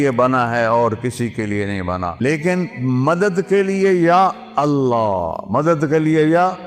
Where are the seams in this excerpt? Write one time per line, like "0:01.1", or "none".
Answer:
0:02.2